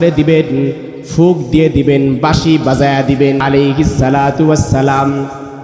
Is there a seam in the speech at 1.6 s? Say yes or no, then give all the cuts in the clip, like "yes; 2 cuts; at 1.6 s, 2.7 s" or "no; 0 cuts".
no; 1 cut; at 3.4 s